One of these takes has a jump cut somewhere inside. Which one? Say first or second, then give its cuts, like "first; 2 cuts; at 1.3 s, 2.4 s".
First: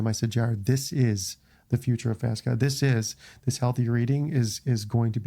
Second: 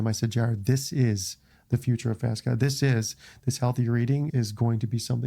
second; 1 cut; at 4.3 s